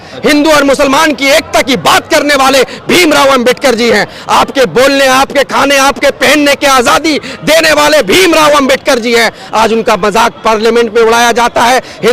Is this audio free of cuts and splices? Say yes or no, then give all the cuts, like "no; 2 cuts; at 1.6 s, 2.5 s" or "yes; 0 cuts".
yes; 0 cuts